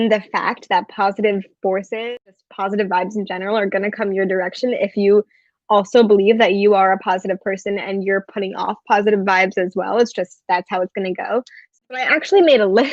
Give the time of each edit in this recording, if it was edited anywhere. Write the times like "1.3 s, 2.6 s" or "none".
2.0 s, 11.8 s